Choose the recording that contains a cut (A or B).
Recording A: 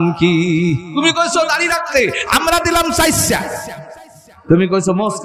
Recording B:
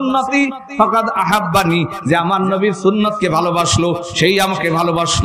A